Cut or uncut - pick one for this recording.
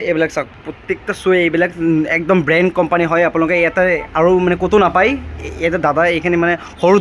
uncut